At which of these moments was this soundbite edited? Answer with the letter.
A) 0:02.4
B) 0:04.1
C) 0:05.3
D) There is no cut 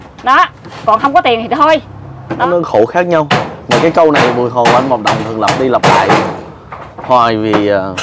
A